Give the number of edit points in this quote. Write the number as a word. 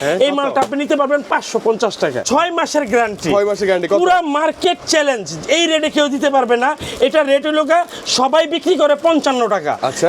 one